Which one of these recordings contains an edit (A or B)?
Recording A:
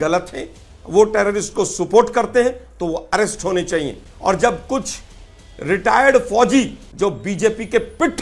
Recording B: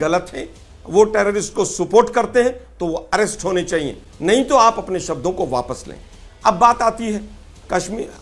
A